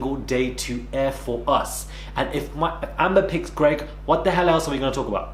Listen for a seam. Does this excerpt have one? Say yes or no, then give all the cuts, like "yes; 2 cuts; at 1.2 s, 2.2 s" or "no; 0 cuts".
no; 0 cuts